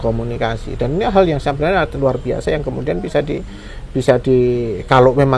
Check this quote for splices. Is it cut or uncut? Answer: uncut